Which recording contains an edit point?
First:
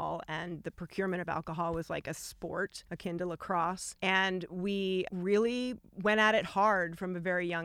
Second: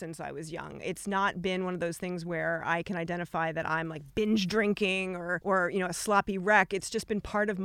first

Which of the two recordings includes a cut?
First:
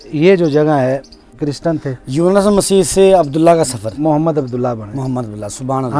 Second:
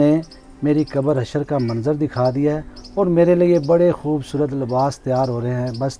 first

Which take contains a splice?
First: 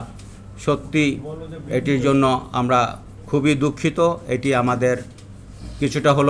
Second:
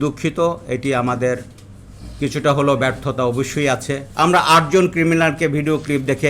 second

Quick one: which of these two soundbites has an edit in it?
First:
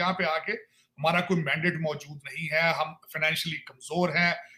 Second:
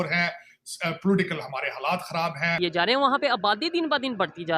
second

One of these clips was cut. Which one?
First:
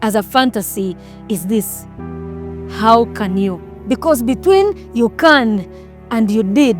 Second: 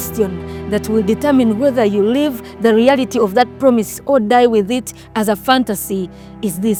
first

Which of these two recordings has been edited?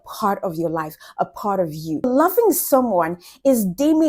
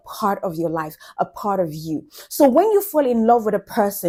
first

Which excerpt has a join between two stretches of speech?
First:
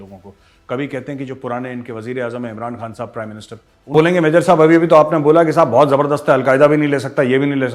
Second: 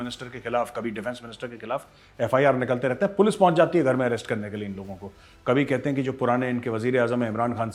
first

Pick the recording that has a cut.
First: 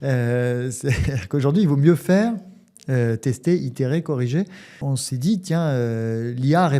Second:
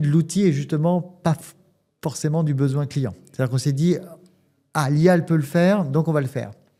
first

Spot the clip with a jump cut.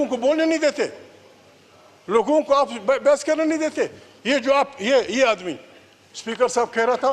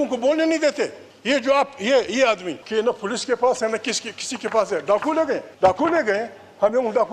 second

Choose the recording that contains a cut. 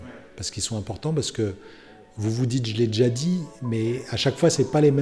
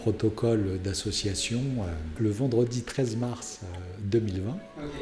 second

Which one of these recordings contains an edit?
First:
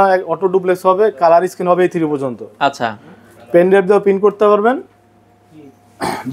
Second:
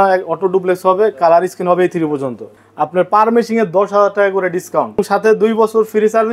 second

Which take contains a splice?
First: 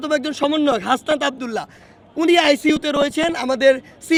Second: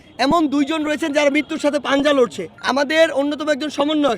second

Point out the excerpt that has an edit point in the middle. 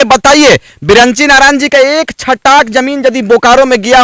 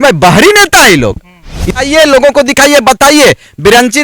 second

